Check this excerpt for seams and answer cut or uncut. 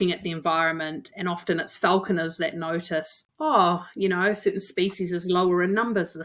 cut